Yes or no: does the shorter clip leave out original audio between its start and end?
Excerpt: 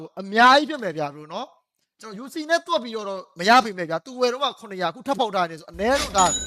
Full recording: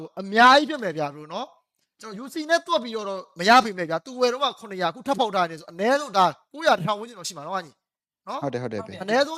no